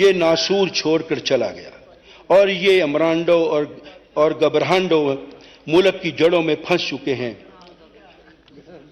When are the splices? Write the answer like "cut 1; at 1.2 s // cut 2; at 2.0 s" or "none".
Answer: none